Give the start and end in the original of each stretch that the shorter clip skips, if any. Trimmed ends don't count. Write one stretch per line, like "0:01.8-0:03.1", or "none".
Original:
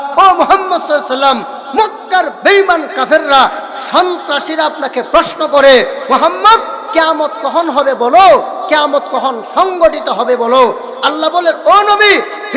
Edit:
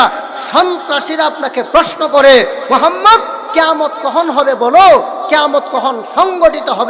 none